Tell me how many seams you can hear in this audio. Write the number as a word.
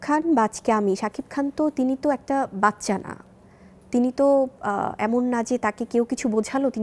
zero